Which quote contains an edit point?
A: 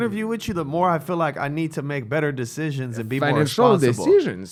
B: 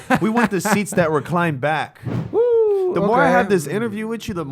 B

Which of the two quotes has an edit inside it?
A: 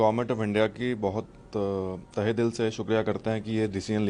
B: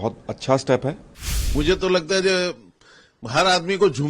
B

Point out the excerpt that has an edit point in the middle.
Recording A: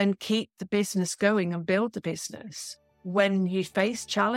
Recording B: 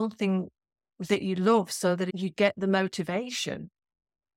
B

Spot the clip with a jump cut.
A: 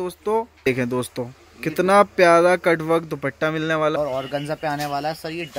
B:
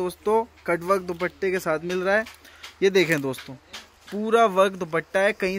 A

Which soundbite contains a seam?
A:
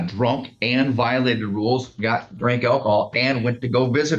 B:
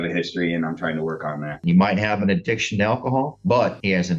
B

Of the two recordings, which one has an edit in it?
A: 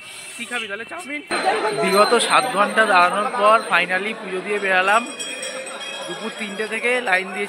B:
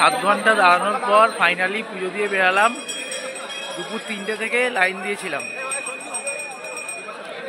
A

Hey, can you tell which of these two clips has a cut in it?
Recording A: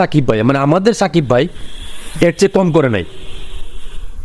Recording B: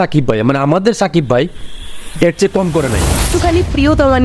B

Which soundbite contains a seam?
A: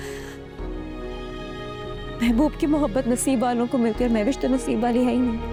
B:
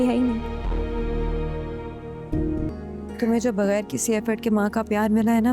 B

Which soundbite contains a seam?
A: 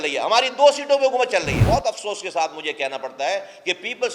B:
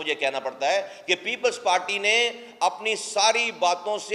A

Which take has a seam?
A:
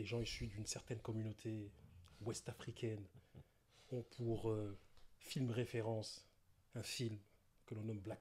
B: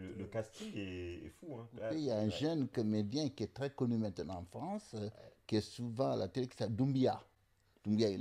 B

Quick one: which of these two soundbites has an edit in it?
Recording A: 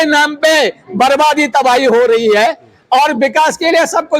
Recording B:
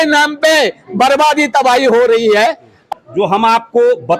B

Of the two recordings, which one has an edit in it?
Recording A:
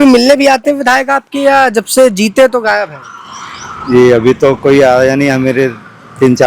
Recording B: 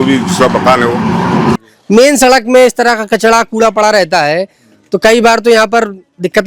B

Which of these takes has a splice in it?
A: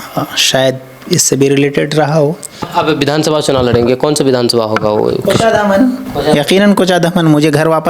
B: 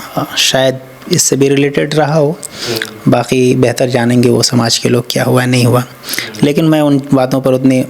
A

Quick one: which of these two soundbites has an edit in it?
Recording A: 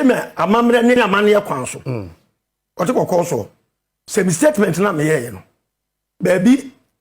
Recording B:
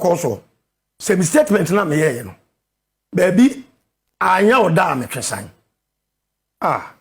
A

